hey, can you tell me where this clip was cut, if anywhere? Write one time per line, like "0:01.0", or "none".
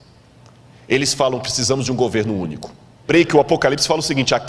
0:03.1